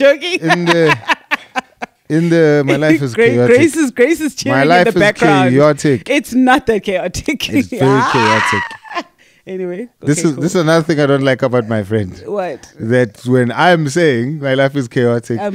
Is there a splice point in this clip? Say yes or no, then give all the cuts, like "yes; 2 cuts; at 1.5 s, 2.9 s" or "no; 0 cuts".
no; 0 cuts